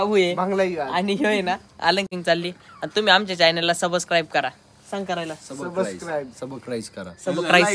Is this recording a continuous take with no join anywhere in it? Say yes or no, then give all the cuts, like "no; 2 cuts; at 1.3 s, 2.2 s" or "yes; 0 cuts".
no; 1 cut; at 2.1 s